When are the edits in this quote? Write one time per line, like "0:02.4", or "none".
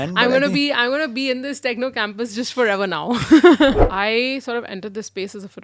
0:03.9